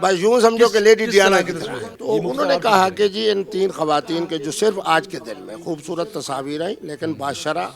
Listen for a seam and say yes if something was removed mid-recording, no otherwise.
yes